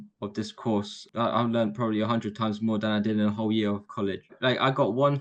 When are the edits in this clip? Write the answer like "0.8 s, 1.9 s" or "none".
1.0 s, 4.3 s